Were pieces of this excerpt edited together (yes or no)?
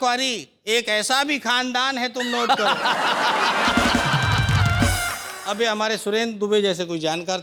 no